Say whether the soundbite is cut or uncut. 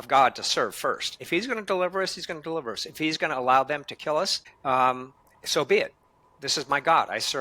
cut